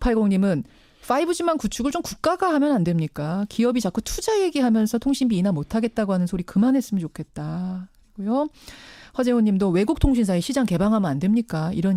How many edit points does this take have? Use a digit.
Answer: 0